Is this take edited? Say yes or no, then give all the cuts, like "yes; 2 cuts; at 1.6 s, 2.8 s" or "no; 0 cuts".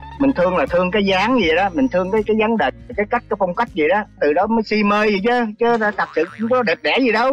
no; 0 cuts